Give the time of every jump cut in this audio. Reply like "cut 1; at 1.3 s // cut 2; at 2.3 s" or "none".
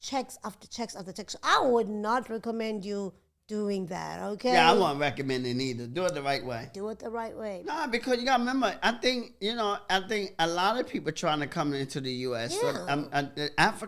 cut 1; at 7.6 s